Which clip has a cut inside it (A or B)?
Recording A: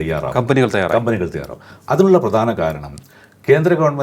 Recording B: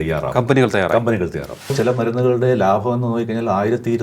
B